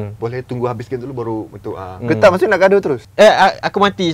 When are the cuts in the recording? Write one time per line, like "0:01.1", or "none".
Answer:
0:03.0